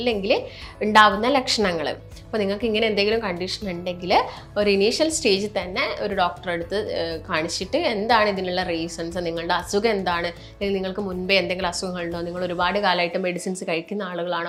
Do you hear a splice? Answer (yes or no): no